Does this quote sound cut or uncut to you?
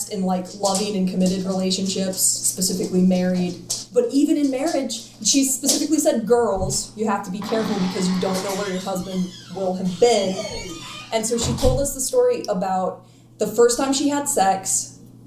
uncut